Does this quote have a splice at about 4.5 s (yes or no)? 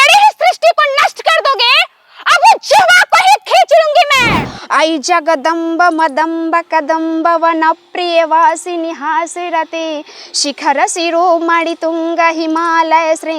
yes